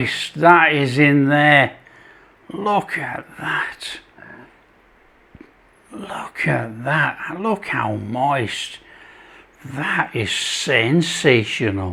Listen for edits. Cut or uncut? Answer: uncut